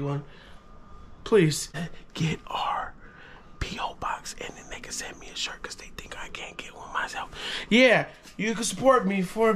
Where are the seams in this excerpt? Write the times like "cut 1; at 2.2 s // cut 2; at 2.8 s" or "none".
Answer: cut 1; at 2.0 s